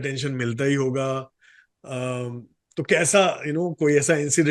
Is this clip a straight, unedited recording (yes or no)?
yes